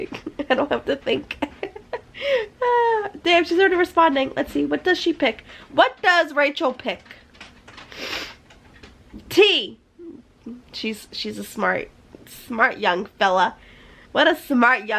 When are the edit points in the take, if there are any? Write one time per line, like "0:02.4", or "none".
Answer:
none